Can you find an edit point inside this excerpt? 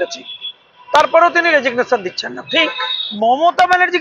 yes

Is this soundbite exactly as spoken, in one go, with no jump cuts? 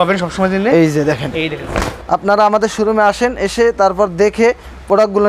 no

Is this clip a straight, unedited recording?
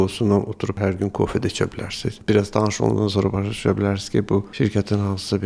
no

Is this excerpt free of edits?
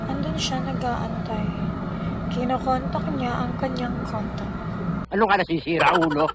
no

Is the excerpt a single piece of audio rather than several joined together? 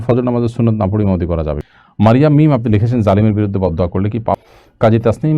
no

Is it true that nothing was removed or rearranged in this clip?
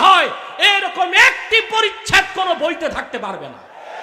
yes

